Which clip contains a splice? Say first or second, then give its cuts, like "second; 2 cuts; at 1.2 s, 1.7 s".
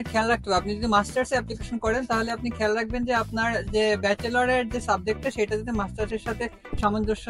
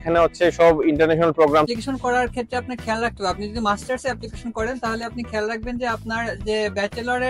second; 1 cut; at 1.7 s